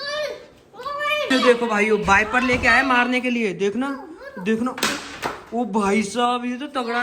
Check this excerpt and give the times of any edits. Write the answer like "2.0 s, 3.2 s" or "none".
1.3 s